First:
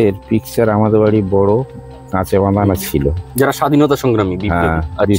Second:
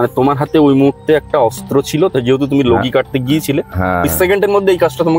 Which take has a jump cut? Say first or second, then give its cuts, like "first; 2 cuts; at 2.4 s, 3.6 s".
second; 1 cut; at 4.0 s